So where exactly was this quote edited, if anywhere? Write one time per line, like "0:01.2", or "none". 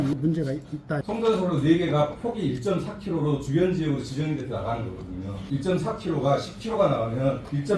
0:01.0

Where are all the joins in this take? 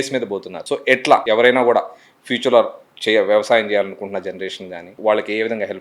0:00.9
0:04.9

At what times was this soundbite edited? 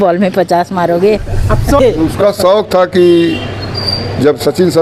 0:01.8

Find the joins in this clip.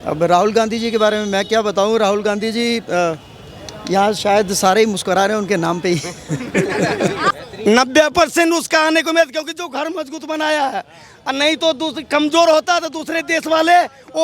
0:07.3

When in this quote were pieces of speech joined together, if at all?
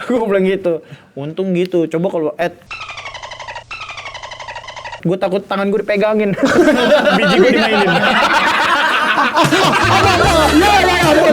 none

